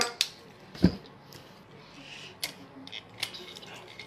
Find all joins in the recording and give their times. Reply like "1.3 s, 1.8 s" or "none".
1.6 s